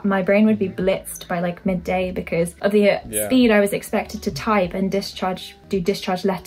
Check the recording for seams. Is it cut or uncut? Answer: cut